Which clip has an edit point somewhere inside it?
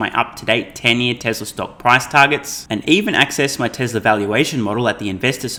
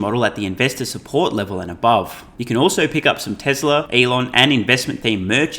second; 2 cuts; at 2.3 s, 3.9 s

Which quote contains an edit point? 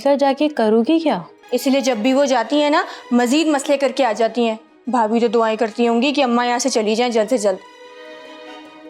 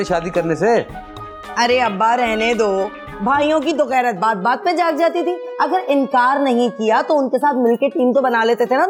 first; 1 cut; at 1.3 s

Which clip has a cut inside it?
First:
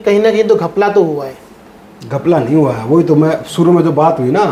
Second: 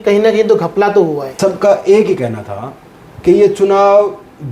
second; 1 cut; at 1.3 s

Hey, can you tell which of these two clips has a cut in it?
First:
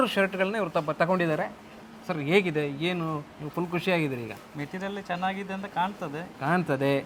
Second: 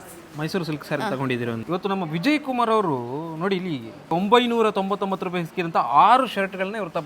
second; 2 cuts; at 1.6 s, 4.1 s

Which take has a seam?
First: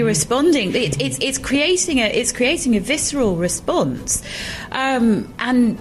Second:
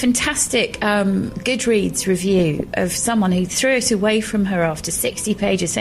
second; 1 cut; at 1.3 s

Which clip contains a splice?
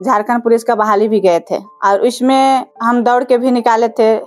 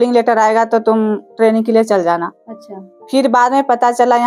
first; 2 cuts; at 1.6 s, 2.7 s

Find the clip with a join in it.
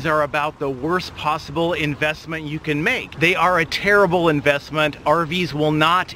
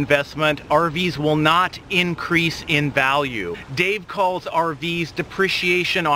first; 1 cut; at 3.1 s

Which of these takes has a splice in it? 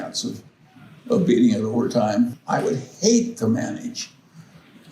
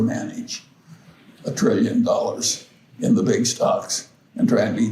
first; 1 cut; at 2.4 s

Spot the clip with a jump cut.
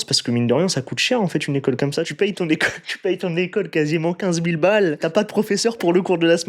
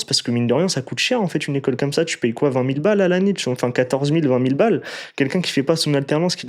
first; 2 cuts; at 2.1 s, 5.0 s

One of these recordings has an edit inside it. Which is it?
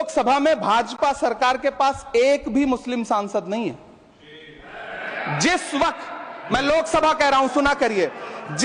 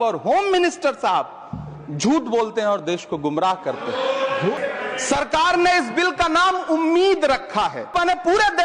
second; 2 cuts; at 4.6 s, 7.9 s

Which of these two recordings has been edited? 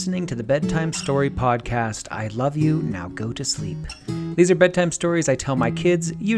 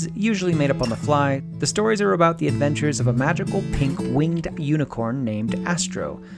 second; 1 cut; at 1.5 s

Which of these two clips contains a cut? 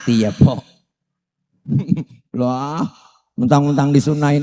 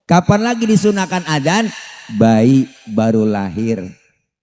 first; 1 cut; at 1.7 s

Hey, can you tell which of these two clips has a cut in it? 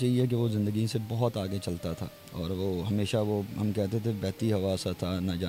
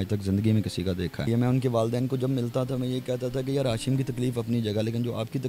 second; 1 cut; at 1.3 s

